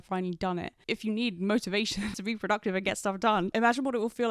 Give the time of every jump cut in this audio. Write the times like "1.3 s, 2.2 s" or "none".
2.1 s